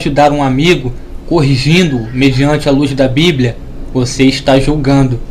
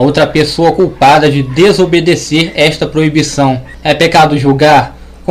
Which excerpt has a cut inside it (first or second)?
first